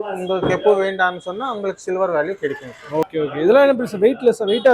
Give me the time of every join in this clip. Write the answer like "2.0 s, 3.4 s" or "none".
3.1 s